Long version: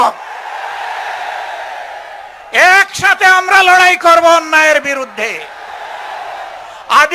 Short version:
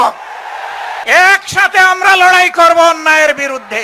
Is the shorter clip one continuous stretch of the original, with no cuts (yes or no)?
no